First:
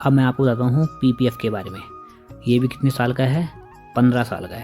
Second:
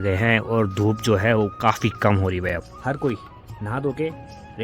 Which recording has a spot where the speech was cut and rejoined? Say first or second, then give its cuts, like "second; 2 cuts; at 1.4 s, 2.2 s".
second; 1 cut; at 2.5 s